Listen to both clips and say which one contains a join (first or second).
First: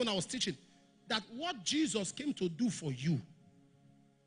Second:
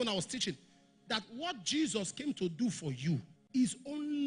second